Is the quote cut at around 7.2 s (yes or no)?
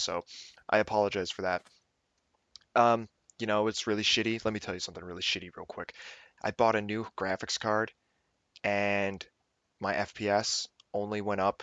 yes